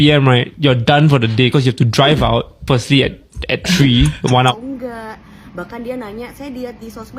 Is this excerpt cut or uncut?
cut